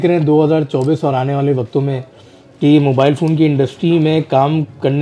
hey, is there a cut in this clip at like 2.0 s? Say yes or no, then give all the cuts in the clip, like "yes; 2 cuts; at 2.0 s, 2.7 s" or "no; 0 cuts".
no; 0 cuts